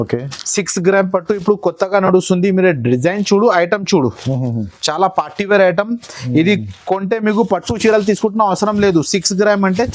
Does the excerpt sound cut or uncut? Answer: uncut